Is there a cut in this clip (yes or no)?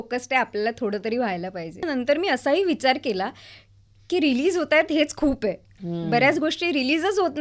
yes